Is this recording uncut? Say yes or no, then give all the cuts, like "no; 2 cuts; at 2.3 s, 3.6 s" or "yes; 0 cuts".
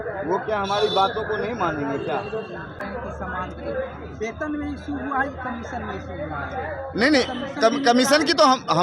no; 1 cut; at 2.8 s